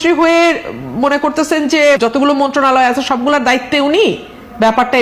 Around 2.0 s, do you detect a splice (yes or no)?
yes